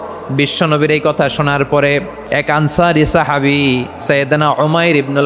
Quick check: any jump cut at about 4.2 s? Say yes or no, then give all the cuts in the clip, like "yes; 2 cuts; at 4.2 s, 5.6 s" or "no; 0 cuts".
no; 1 cut; at 2.2 s